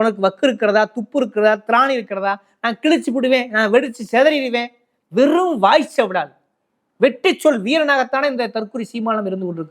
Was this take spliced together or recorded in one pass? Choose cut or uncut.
uncut